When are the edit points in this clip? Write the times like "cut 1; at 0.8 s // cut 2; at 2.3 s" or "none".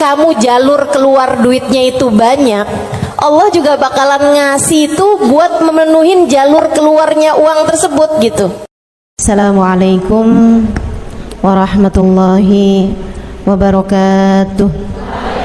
cut 1; at 9.2 s